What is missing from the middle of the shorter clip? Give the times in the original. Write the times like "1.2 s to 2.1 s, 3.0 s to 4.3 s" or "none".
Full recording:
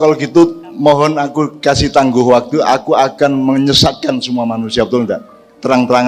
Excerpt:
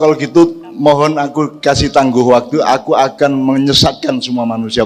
none